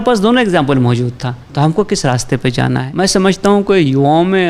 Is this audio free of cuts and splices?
no; 1 cut; at 2.9 s

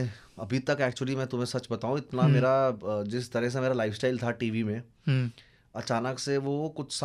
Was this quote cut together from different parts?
no; 0 cuts

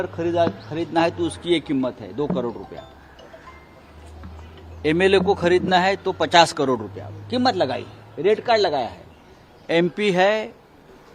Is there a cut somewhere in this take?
no; 0 cuts

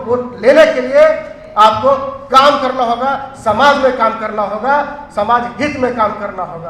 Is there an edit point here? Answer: no; 0 cuts

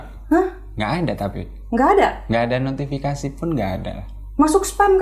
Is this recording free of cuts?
yes; 0 cuts

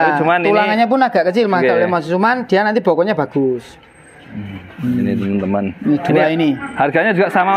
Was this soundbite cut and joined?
no; 0 cuts

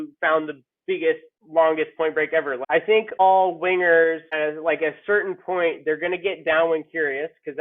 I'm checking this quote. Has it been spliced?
yes; 1 cut; at 2.6 s

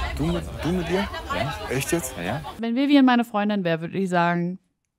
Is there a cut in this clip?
yes; 1 cut; at 2.5 s

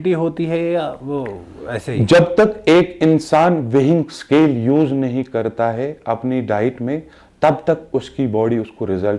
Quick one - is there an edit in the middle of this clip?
no; 0 cuts

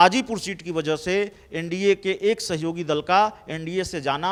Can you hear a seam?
no; 0 cuts

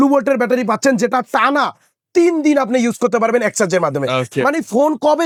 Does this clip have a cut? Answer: no; 0 cuts

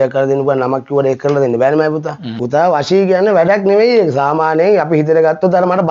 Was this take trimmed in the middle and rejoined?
yes; 1 cut; at 2.4 s

